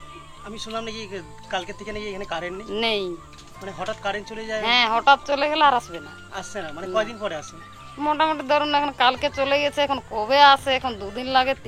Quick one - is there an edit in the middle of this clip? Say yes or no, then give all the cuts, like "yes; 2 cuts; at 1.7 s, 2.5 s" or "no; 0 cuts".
no; 0 cuts